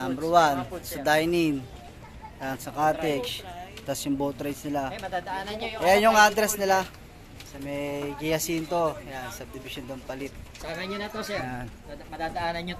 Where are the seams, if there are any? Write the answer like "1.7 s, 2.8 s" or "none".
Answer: none